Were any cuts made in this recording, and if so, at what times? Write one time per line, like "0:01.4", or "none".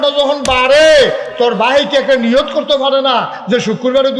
none